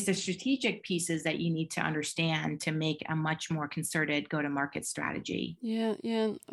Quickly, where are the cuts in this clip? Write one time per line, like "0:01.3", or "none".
none